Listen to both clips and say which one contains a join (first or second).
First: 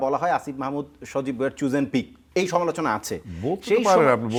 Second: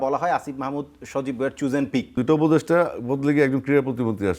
second